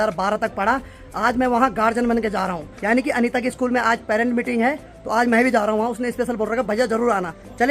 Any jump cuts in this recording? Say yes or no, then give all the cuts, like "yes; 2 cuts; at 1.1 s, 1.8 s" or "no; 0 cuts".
no; 0 cuts